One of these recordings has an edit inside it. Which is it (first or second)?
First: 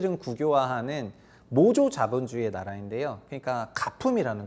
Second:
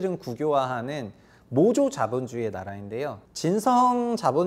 second